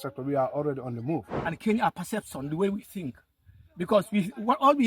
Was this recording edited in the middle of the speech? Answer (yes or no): yes